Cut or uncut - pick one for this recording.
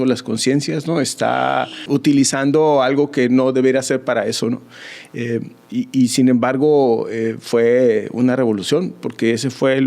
cut